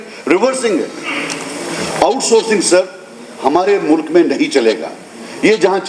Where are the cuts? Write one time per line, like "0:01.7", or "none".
none